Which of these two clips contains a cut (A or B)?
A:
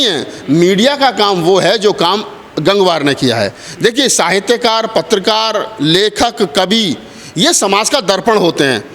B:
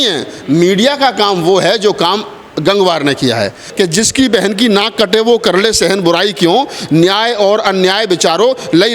B